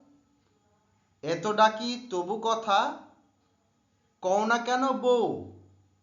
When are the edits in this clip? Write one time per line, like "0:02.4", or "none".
0:05.1